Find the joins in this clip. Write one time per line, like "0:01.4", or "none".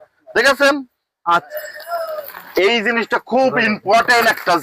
0:01.5